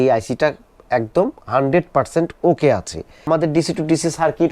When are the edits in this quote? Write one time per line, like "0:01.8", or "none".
0:03.3